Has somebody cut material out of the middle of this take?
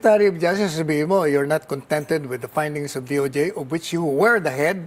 no; 0 cuts

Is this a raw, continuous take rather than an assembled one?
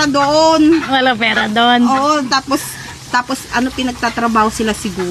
yes; 0 cuts

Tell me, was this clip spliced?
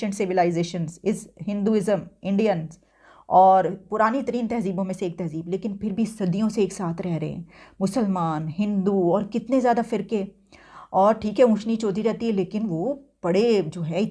no; 0 cuts

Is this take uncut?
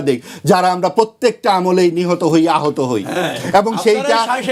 yes; 0 cuts

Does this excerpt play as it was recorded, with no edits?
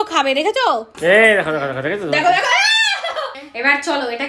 no; 2 cuts; at 0.9 s, 3.4 s

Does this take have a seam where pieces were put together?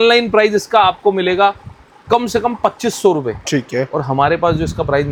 no; 0 cuts

